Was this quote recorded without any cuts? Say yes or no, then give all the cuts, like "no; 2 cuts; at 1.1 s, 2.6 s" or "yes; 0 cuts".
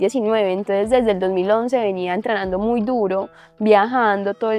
yes; 0 cuts